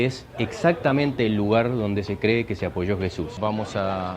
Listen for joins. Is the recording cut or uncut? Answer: cut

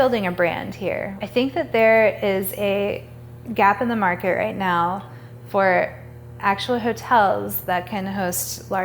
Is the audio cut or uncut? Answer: cut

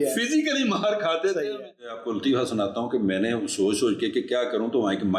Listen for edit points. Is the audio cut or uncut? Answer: cut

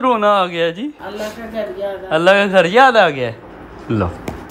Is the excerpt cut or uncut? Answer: uncut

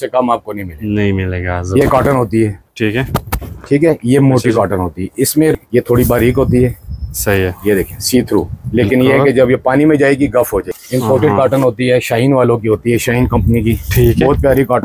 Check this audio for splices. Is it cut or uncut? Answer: cut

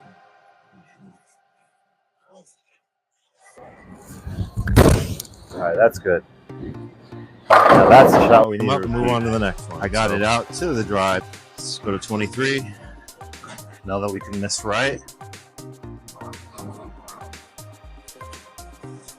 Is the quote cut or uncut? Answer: cut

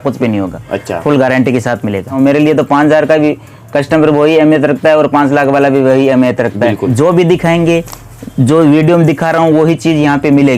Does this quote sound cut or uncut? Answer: cut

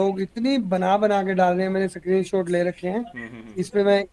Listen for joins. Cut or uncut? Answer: uncut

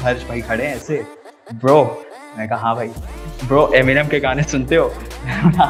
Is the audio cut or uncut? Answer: uncut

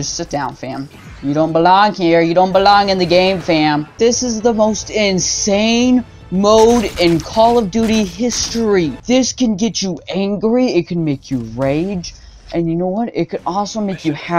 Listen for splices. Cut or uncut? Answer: cut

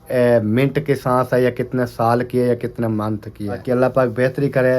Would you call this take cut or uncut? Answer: cut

